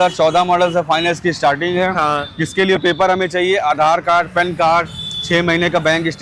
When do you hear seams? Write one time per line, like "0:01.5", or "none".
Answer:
none